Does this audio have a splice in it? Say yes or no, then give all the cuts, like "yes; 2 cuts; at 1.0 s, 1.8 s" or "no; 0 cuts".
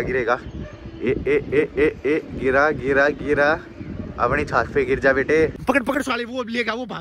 yes; 1 cut; at 5.6 s